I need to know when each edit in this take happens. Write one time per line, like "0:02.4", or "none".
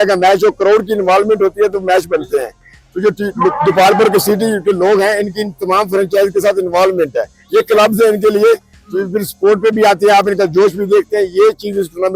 none